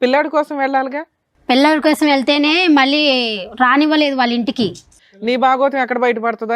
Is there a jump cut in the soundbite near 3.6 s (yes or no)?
no